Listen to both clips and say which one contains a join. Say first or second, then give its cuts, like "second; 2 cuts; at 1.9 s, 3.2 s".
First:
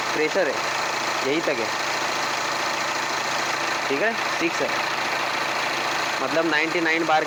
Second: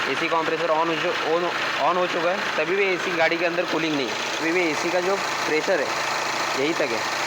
second; 1 cut; at 4.4 s